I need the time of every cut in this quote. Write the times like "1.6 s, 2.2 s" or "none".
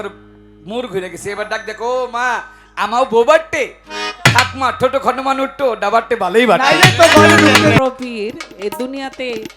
7.8 s